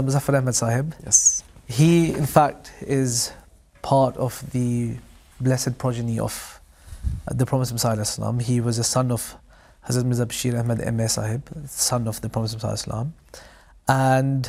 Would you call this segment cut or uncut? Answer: uncut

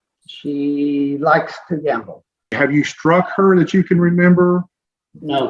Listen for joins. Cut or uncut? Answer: cut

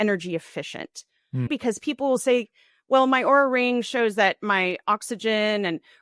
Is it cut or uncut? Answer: cut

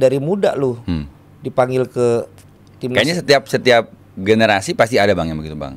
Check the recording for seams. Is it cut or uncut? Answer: uncut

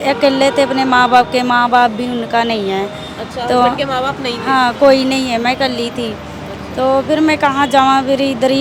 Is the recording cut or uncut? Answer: uncut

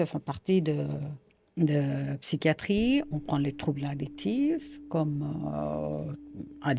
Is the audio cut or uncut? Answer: uncut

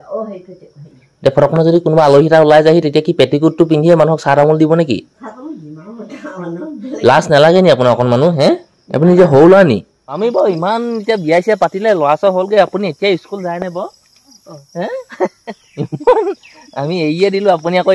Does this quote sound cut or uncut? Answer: cut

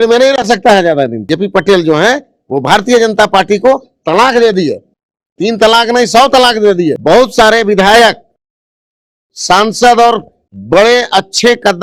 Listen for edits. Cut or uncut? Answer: cut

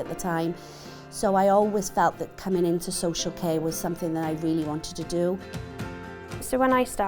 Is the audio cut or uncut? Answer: cut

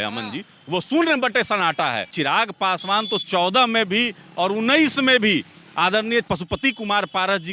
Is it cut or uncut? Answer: cut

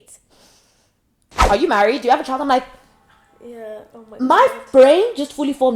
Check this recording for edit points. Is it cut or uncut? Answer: cut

